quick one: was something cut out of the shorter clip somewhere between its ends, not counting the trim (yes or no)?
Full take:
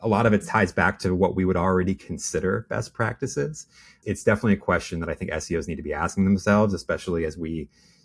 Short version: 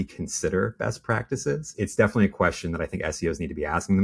yes